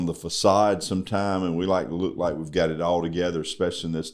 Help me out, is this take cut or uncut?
uncut